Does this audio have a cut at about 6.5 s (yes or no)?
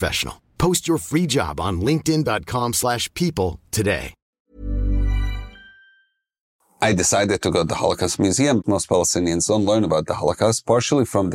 yes